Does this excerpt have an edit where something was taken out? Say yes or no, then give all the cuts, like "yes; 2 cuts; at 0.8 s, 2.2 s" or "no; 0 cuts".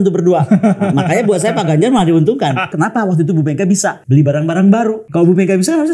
yes; 3 cuts; at 2.7 s, 4.0 s, 5.0 s